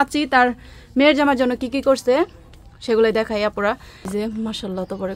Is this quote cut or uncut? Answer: cut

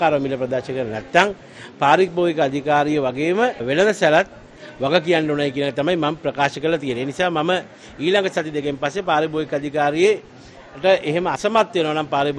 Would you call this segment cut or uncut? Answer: uncut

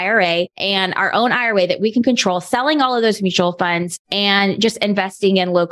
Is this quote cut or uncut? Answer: uncut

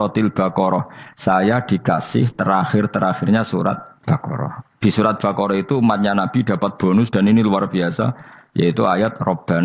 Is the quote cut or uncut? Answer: cut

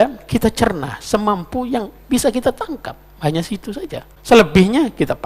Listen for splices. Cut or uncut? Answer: cut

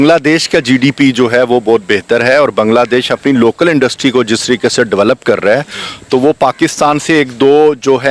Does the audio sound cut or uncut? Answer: uncut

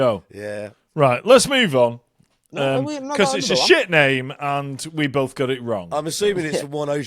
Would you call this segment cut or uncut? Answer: uncut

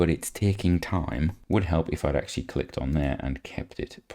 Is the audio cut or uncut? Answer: cut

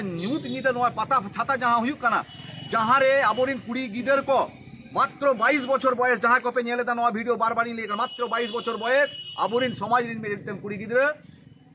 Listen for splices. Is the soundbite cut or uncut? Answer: uncut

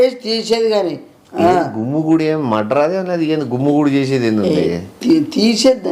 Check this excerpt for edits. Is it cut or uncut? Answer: uncut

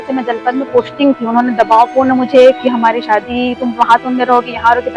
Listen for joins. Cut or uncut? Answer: uncut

